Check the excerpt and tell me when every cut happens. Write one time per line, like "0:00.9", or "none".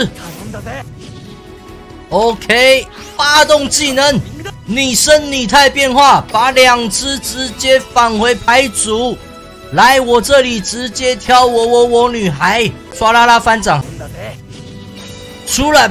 0:03.1
0:12.8
0:13.8